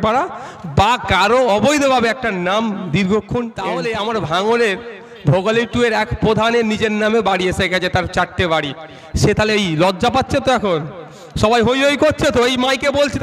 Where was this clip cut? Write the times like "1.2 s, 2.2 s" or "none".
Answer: 3.7 s